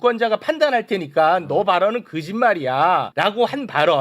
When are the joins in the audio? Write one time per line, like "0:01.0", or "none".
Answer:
0:03.1